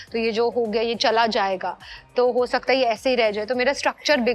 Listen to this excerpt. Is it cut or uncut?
uncut